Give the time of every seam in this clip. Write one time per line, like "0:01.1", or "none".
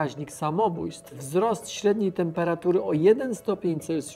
0:01.1